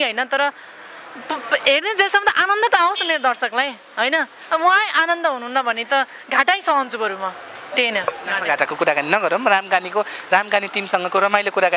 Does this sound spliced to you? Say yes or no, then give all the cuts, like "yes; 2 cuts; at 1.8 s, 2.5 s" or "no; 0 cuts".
no; 0 cuts